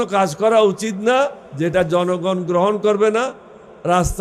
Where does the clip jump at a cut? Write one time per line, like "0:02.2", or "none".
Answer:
0:01.4